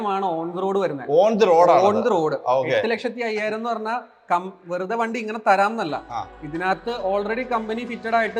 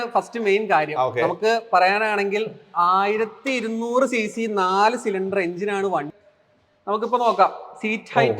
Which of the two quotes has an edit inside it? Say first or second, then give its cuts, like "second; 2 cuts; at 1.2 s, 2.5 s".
second; 1 cut; at 6.1 s